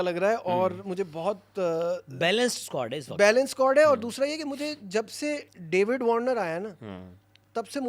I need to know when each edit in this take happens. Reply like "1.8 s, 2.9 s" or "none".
none